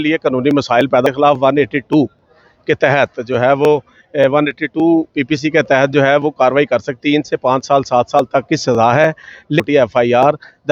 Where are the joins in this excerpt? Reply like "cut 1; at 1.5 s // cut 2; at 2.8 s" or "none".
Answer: cut 1; at 1.0 s // cut 2; at 6.9 s // cut 3; at 9.6 s

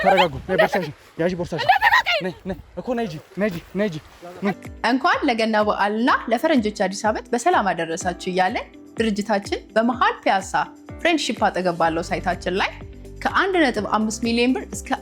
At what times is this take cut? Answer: cut 1; at 4.6 s

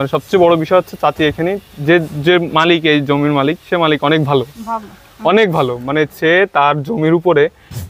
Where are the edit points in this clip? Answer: none

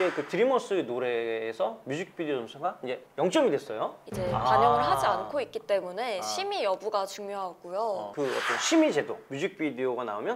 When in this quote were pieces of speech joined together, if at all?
cut 1; at 4.0 s // cut 2; at 8.1 s

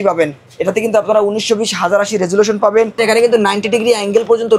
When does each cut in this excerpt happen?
cut 1; at 3.0 s

